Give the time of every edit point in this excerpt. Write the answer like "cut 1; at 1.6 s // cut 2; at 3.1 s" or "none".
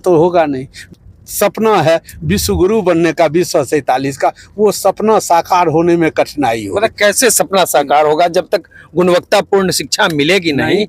cut 1; at 0.9 s

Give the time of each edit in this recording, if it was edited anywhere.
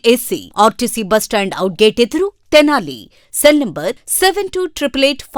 none

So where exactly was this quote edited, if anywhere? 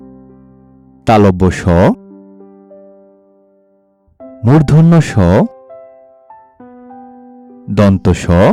none

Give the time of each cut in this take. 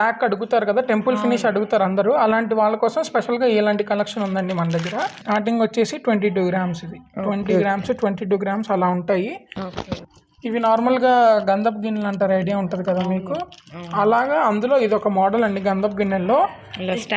cut 1; at 5.2 s // cut 2; at 10.1 s

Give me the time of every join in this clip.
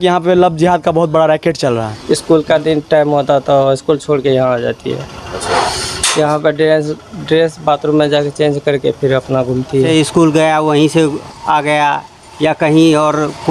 cut 1; at 1.9 s // cut 2; at 9.9 s

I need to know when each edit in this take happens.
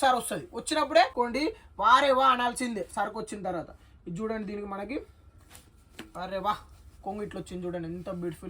cut 1; at 1.1 s

